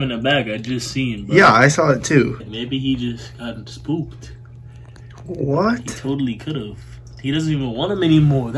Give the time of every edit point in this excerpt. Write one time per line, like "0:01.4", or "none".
0:02.4